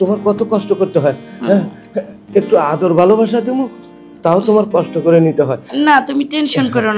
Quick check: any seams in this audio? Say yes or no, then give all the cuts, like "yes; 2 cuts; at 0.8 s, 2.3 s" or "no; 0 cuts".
no; 0 cuts